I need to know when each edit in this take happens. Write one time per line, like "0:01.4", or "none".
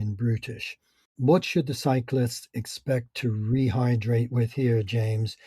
0:01.1